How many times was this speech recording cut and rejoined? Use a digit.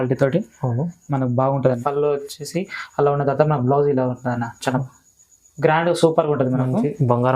1